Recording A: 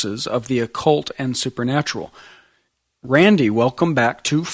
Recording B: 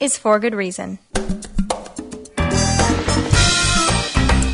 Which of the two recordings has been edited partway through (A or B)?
A